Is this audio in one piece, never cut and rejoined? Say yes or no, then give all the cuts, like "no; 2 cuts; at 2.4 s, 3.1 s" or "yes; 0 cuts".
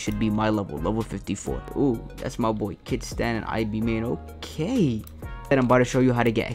no; 2 cuts; at 1.6 s, 5.5 s